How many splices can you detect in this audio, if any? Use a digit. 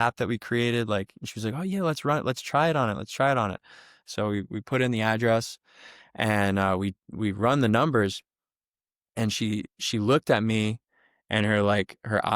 0